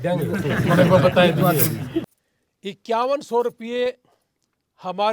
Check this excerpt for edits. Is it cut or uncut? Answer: cut